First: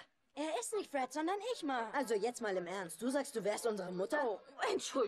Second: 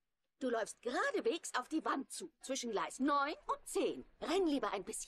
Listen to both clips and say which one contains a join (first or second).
first